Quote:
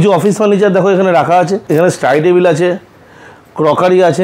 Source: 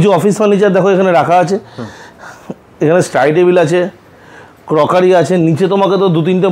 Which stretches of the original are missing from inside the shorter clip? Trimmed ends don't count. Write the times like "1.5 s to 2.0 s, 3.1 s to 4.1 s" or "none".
1.6 s to 2.7 s